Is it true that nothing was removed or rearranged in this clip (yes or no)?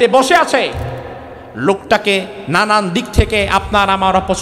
yes